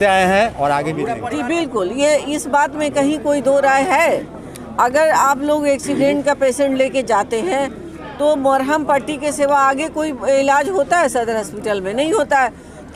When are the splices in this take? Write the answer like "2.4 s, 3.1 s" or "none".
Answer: 1.1 s